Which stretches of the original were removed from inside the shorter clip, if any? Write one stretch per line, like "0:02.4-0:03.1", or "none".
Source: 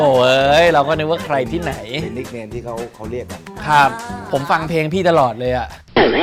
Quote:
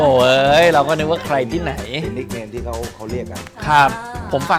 none